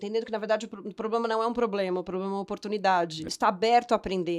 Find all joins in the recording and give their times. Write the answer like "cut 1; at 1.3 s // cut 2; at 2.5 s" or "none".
cut 1; at 3.2 s